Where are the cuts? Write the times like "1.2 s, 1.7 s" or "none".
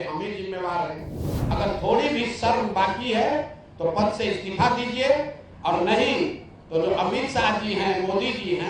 1.3 s